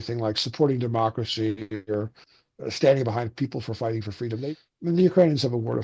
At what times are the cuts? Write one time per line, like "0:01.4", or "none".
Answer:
0:04.4

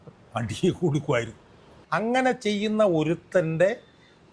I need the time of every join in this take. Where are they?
0:01.8

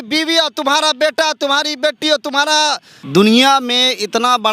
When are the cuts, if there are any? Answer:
0:02.9

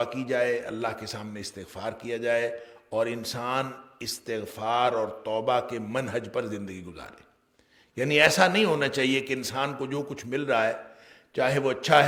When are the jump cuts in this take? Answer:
none

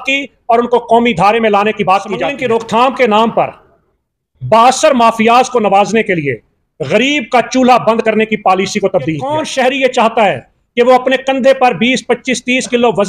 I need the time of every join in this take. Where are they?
0:02.3
0:09.4

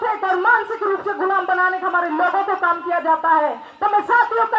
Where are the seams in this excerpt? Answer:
none

